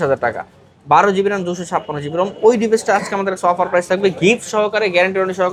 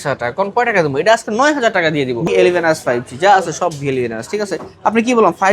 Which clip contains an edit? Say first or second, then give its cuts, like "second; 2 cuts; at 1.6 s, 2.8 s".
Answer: second; 1 cut; at 2.3 s